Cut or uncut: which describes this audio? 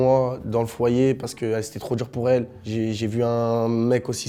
uncut